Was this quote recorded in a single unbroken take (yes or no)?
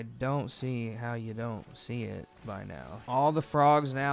no